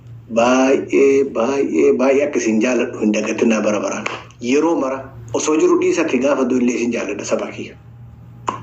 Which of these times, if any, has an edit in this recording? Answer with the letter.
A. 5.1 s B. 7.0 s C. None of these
A